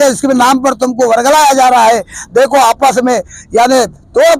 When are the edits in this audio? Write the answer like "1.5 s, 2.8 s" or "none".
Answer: none